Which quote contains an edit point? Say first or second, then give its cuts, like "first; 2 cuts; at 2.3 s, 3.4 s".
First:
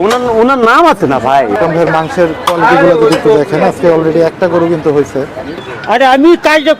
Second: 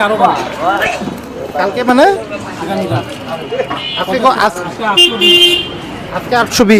first; 2 cuts; at 1.6 s, 5.5 s